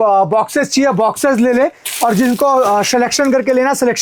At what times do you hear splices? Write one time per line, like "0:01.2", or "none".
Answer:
none